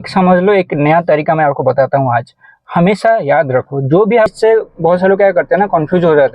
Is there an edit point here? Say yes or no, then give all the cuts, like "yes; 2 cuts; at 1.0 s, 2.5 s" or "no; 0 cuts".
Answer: yes; 1 cut; at 4.3 s